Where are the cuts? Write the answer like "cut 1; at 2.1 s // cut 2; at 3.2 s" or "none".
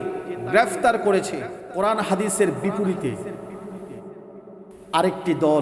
cut 1; at 1.6 s